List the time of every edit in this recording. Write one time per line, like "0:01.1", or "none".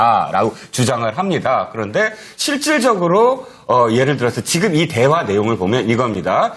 0:03.2

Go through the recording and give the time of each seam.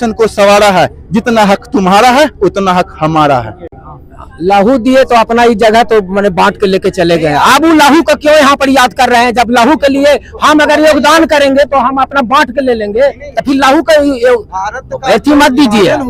none

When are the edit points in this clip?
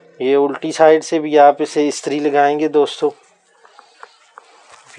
none

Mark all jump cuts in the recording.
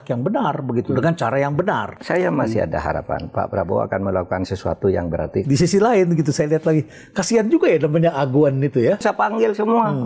0:01.9
0:05.4
0:09.0

